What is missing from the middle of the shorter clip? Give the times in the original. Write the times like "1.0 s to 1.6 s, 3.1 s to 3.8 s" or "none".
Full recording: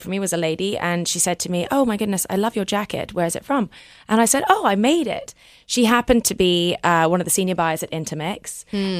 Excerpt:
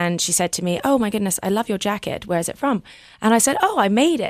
none